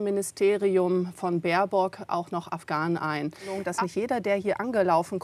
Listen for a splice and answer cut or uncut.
cut